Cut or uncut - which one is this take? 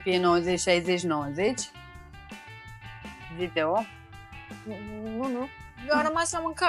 uncut